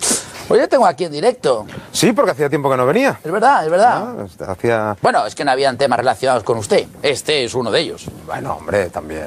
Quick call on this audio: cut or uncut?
cut